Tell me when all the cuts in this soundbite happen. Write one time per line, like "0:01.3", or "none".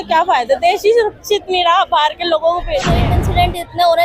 0:03.0